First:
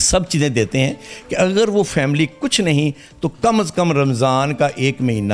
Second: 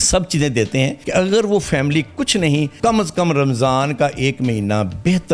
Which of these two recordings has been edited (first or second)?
second